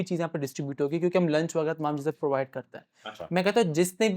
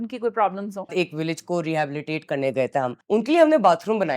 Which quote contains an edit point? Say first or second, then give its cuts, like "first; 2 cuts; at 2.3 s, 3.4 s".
second; 2 cuts; at 0.9 s, 3.0 s